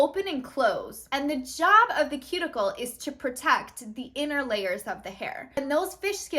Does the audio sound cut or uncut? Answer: cut